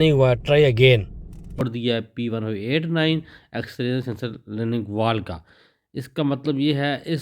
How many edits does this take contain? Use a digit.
1